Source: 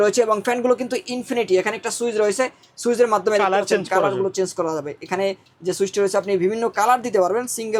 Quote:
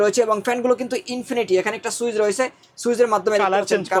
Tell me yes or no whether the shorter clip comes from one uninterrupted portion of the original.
yes